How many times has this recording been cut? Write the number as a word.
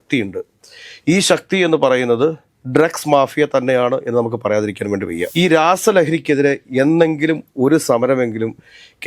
one